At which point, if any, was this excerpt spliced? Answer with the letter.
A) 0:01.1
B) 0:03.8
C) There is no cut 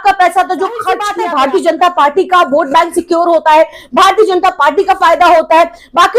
A